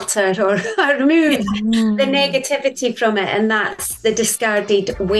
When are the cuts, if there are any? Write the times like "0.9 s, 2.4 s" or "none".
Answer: none

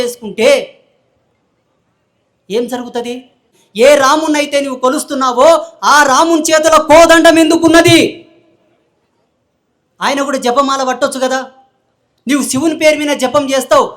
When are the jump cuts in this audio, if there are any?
3.6 s

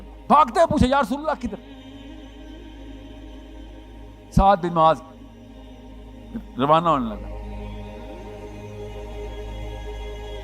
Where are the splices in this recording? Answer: 1.6 s, 3.7 s, 7.4 s

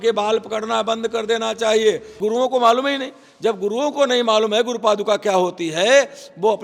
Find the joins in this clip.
2.1 s

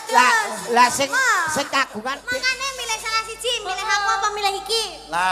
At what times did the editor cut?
2.3 s

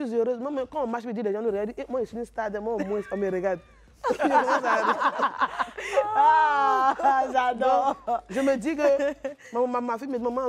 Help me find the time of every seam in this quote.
none

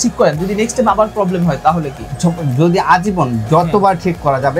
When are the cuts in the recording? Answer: none

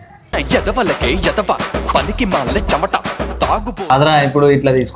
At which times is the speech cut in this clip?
3.9 s

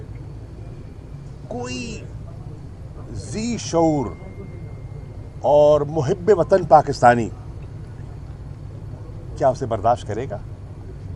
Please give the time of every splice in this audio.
none

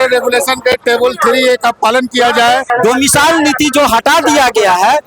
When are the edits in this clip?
2.7 s

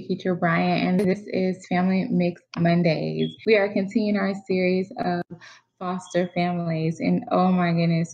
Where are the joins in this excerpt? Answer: 3.4 s

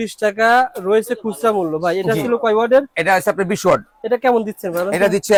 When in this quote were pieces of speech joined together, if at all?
none

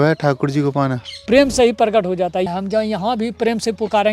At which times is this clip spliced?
1.2 s, 2.5 s

